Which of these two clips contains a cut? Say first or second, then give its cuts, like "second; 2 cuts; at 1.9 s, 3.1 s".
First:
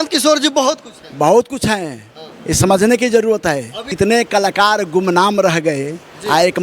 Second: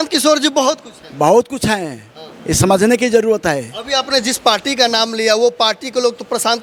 first; 1 cut; at 3.8 s